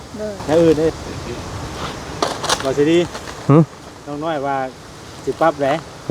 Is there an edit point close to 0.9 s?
yes; 1 cut; at 0.9 s

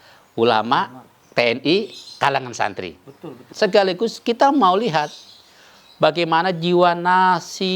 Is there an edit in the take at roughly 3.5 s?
yes; 1 cut; at 3.5 s

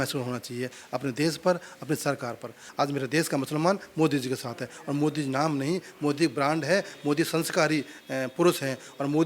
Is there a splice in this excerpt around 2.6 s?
yes; 1 cut; at 2.6 s

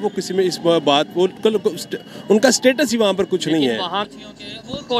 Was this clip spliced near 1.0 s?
no; 1 cut; at 4.0 s

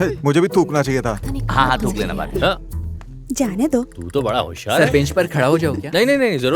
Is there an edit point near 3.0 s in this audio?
no; 0 cuts

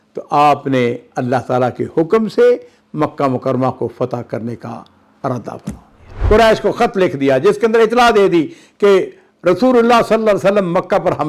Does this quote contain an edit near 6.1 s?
yes; 1 cut; at 6.1 s

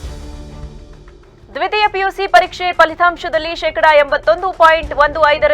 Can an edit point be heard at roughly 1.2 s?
yes; 1 cut; at 1.2 s

